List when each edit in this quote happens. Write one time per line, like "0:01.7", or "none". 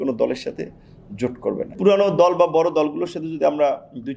0:01.8